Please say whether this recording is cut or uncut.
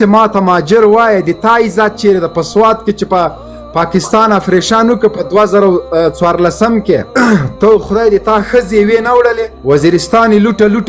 uncut